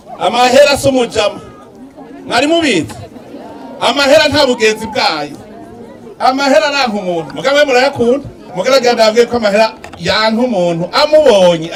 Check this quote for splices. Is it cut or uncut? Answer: uncut